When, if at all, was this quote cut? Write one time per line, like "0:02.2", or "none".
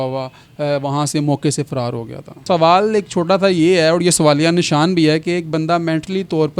0:02.4